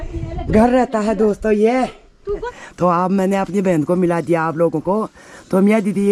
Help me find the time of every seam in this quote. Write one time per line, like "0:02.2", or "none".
0:02.5